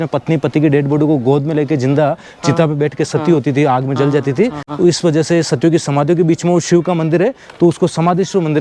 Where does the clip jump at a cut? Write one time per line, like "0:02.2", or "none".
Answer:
none